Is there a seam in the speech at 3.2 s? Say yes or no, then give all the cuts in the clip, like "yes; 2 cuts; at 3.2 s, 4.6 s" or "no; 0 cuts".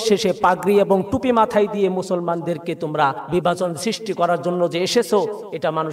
yes; 1 cut; at 3.2 s